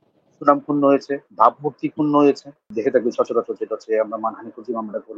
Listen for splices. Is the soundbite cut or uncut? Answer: cut